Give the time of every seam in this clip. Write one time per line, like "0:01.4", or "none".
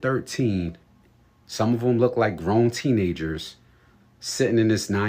none

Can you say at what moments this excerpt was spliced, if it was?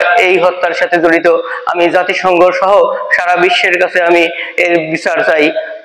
none

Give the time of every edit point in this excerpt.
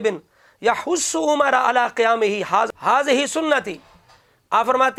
none

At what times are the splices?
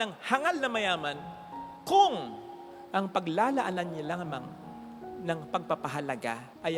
none

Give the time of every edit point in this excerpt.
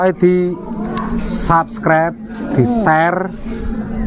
none

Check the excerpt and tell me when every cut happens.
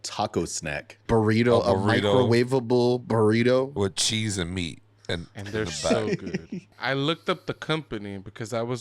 0:00.9
0:06.7

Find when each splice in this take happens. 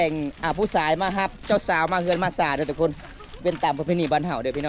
0:01.4

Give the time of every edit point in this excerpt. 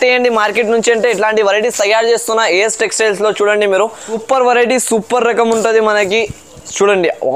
0:04.2

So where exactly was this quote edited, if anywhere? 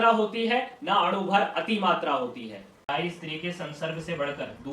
0:02.8

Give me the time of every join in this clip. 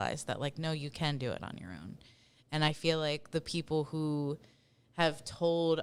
none

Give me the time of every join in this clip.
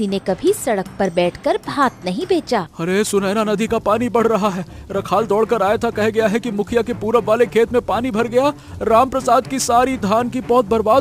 0:02.7

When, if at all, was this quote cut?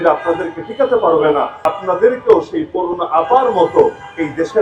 0:01.6

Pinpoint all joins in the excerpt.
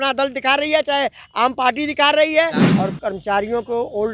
0:02.6

